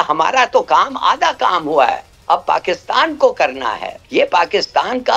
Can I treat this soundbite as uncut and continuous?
no; 1 cut; at 3.9 s

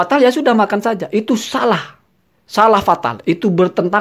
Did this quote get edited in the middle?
no; 0 cuts

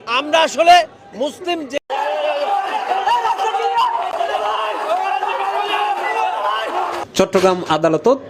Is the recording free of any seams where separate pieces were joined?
no; 1 cut; at 1.7 s

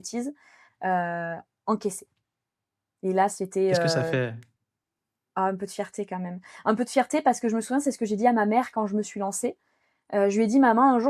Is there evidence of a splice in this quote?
no; 0 cuts

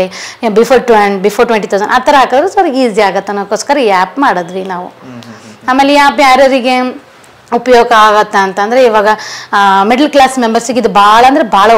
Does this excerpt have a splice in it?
no; 0 cuts

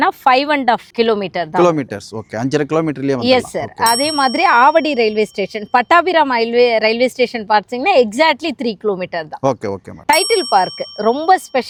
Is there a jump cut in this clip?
no; 0 cuts

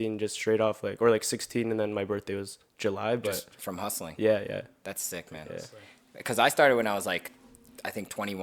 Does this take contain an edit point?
no; 0 cuts

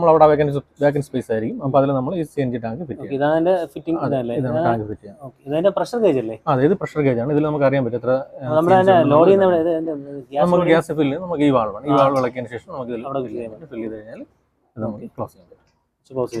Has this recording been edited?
no; 0 cuts

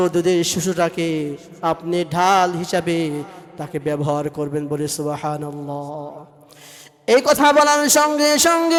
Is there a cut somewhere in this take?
no; 0 cuts

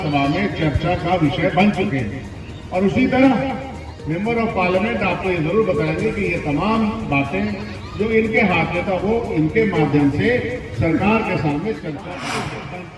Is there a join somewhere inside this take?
no; 0 cuts

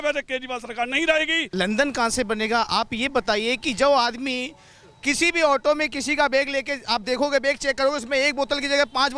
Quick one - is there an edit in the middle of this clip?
yes; 1 cut; at 1.5 s

